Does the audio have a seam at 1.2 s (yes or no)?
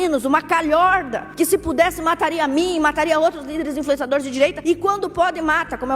yes